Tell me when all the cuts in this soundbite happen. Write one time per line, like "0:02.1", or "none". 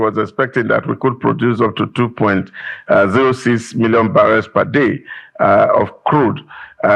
none

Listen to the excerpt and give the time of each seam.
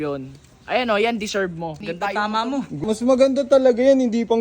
0:01.8
0:02.8

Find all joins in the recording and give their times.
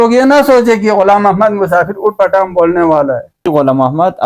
0:03.3

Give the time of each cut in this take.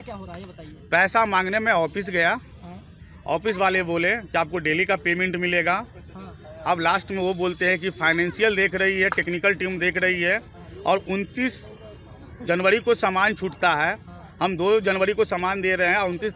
none

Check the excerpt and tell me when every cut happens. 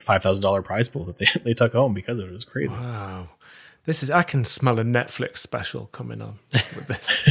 none

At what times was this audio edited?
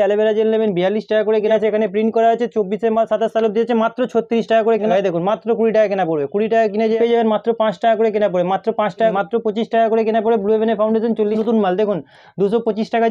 0:01.5
0:04.9
0:07.0
0:09.1
0:11.4

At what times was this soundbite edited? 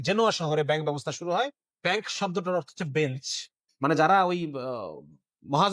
0:01.6
0:03.6

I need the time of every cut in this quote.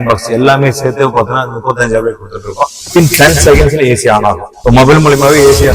0:02.8
0:04.5

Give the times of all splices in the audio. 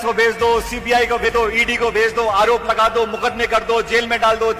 0:01.3

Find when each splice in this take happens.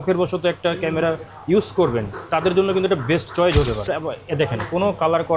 0:03.9

